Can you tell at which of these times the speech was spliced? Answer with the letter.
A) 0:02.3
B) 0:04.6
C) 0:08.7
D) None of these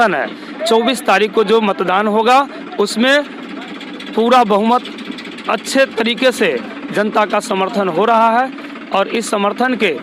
D